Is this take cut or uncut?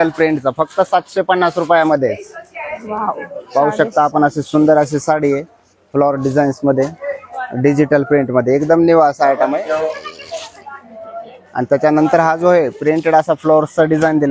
uncut